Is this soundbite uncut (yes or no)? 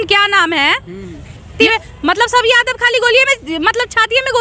no